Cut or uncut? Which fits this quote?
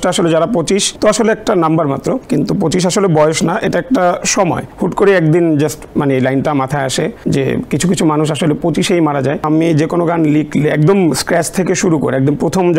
cut